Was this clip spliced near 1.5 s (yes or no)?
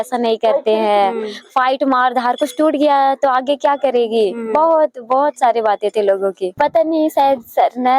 no